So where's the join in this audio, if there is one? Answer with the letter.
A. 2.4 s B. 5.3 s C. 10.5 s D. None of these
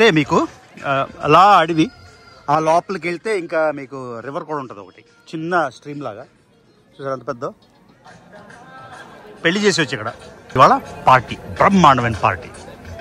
C